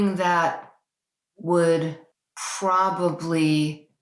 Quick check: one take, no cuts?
yes; 0 cuts

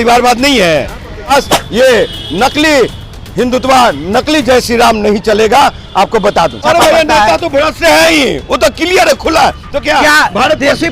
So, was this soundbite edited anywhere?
yes; 2 cuts; at 1.3 s, 6.6 s

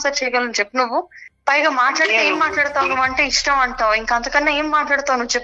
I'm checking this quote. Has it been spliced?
no; 0 cuts

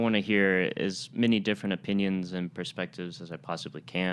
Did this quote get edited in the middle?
no; 0 cuts

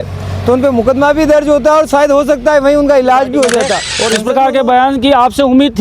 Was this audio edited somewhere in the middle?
yes; 1 cut; at 3.9 s

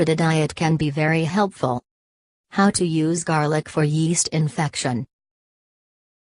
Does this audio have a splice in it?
no; 0 cuts

